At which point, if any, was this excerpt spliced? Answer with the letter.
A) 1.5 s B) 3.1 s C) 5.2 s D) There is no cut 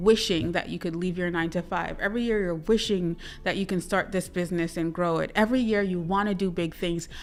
D